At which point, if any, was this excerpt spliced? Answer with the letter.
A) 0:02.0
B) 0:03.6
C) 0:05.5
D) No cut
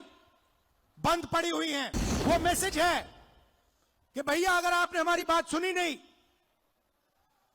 A